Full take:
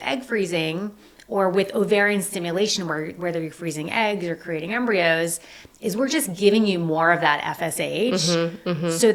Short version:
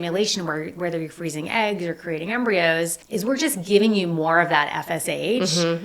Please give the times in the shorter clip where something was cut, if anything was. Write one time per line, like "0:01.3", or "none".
0:03.0